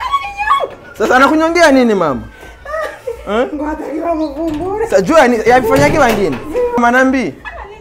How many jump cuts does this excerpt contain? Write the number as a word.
one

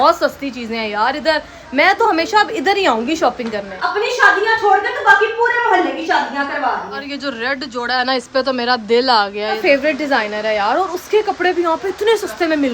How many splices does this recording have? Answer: three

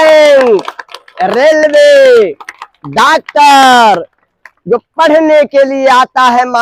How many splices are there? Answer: zero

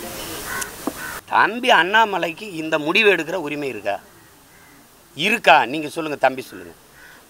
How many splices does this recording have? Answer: one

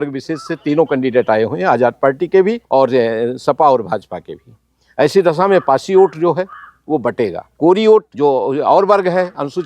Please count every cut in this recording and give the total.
three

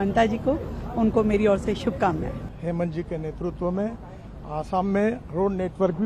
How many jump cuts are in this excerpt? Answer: one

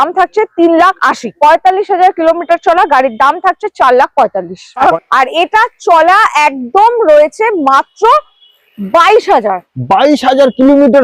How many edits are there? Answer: two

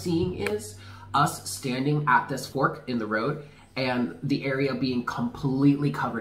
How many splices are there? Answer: one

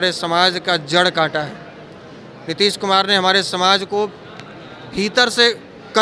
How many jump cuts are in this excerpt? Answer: zero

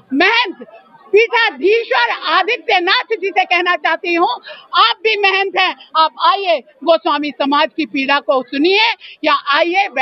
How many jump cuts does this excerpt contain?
zero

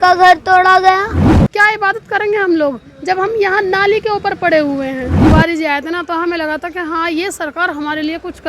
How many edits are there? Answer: two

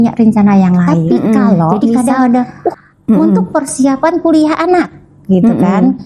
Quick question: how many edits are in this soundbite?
one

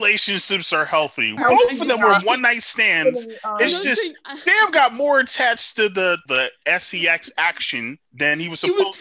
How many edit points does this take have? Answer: three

